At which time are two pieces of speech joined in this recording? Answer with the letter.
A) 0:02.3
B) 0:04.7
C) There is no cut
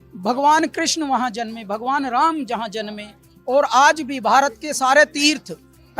C